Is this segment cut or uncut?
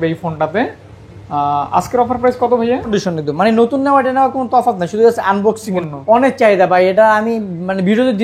cut